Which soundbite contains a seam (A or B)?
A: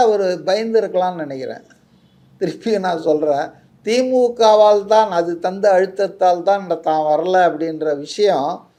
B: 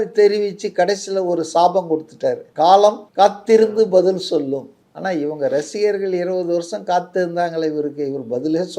B